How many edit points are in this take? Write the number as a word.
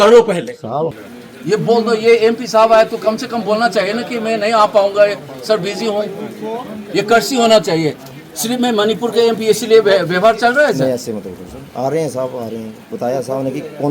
one